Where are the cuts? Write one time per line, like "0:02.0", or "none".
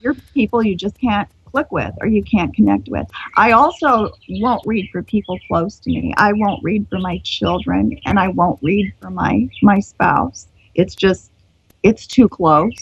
none